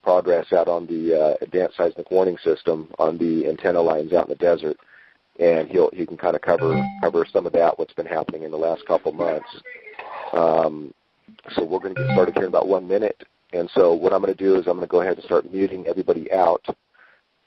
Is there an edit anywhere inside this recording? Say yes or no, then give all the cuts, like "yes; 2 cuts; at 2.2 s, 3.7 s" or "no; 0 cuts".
no; 0 cuts